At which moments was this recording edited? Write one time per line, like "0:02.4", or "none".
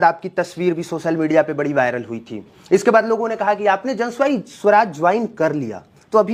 none